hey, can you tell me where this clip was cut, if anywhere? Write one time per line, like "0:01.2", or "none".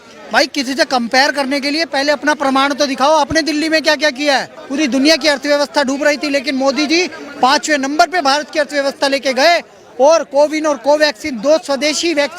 0:04.6